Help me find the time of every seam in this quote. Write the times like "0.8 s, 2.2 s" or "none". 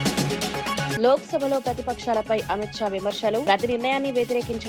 0.9 s